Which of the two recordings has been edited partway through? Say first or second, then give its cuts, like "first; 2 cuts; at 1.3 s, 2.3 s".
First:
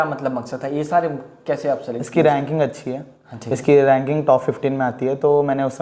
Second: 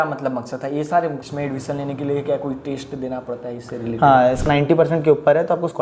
second; 2 cuts; at 1.2 s, 4.4 s